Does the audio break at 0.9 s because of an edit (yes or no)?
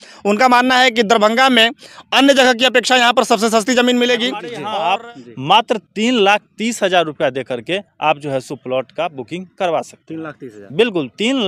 no